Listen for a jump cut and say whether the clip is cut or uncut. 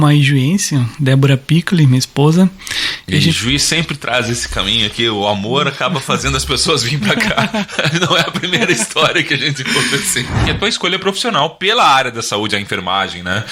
cut